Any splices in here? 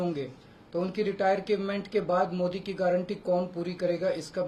no; 0 cuts

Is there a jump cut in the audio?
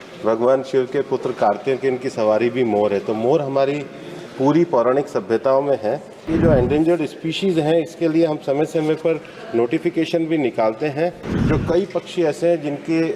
yes; 2 cuts; at 6.2 s, 11.3 s

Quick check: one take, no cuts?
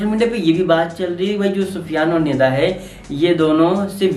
yes; 0 cuts

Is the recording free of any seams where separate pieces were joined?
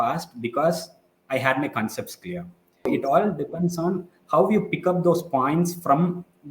no; 1 cut; at 2.9 s

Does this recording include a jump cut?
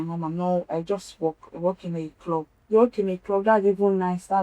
yes; 1 cut; at 2.5 s

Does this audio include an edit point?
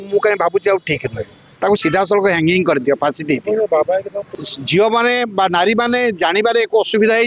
yes; 1 cut; at 4.2 s

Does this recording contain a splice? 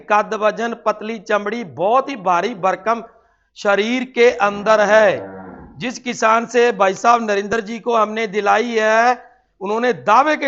no; 0 cuts

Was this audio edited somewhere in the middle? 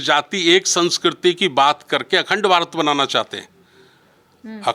no; 0 cuts

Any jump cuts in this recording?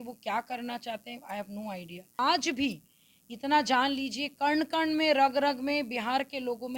yes; 1 cut; at 2.2 s

